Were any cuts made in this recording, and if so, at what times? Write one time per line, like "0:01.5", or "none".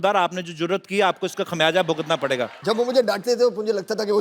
0:02.5